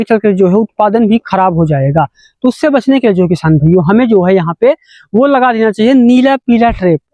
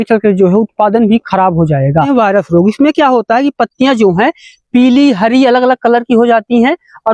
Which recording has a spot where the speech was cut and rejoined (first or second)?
second